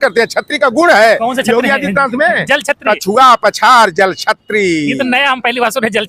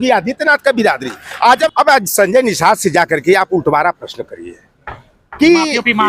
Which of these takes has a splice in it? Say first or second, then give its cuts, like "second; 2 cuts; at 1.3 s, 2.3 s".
second; 1 cut; at 1.7 s